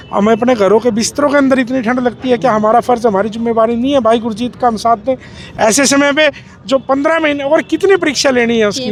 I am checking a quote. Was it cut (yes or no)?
no